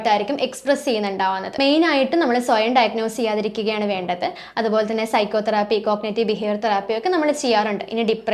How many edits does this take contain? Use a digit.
1